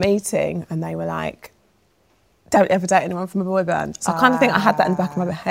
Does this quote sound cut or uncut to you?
uncut